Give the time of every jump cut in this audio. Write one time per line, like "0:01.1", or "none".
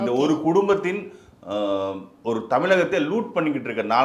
none